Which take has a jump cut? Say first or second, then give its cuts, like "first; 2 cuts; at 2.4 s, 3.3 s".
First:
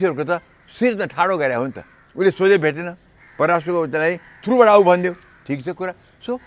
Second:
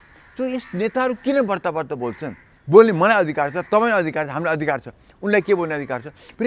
second; 1 cut; at 2.5 s